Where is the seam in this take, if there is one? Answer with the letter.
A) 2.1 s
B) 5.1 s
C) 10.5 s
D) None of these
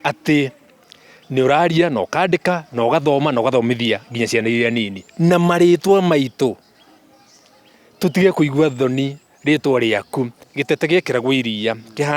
C